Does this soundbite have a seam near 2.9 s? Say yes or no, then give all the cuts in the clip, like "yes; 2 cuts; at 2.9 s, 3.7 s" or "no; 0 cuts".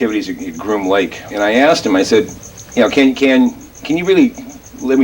no; 1 cut; at 1.5 s